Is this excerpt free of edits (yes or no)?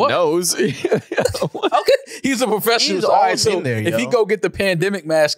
yes